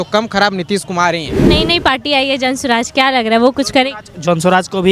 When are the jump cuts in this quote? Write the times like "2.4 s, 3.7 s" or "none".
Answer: 1.4 s